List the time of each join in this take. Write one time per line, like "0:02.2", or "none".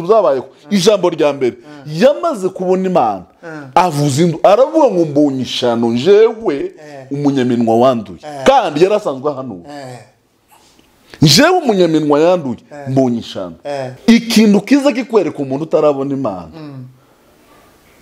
0:13.9